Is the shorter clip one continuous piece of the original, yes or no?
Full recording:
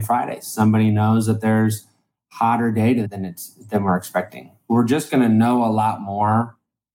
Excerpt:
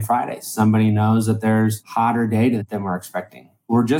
no